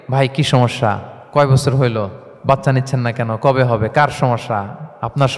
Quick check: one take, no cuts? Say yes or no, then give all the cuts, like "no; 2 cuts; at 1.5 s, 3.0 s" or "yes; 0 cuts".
no; 2 cuts; at 1.1 s, 2.3 s